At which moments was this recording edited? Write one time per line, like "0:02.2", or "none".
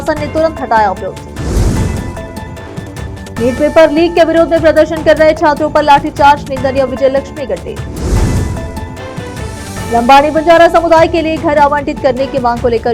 none